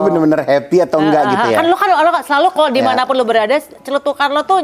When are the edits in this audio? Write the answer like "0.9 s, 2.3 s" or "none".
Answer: none

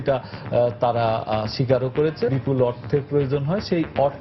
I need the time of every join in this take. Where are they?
2.3 s

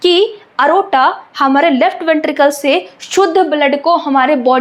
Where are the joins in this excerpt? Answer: none

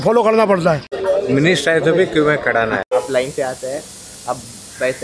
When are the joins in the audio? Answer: 0.9 s, 2.8 s

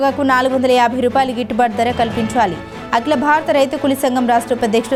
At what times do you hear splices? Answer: none

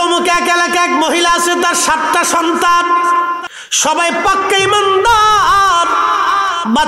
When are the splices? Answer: 3.4 s

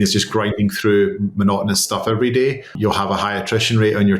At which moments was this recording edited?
2.8 s

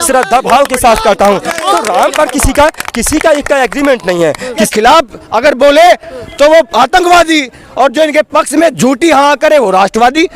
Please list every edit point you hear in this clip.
4.7 s

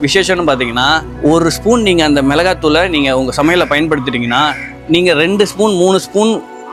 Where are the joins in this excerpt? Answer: 1.1 s

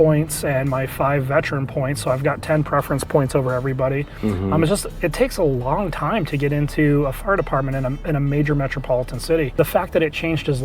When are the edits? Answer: 9.5 s

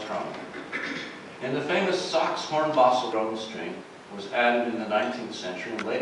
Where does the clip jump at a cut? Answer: none

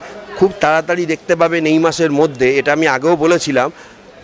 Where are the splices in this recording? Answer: none

